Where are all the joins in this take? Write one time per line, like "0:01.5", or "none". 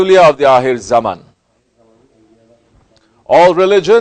0:01.3